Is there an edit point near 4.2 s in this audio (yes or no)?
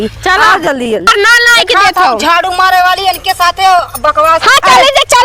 no